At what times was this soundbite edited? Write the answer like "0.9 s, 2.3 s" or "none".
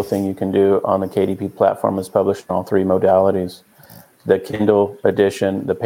none